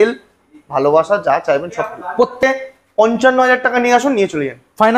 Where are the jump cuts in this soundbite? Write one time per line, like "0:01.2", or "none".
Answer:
0:02.4